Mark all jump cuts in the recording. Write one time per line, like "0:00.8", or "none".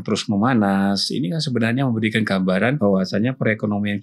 0:02.8